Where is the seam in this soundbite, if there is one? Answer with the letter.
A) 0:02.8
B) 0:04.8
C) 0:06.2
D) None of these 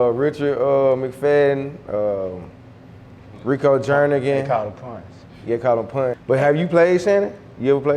C